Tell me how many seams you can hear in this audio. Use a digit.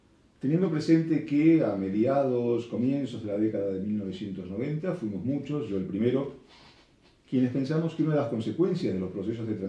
1